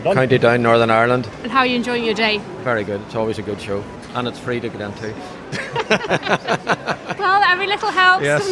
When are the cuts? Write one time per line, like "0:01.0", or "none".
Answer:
0:01.3
0:04.0